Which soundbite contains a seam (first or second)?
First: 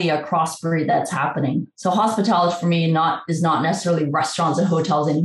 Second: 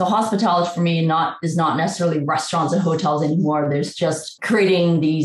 second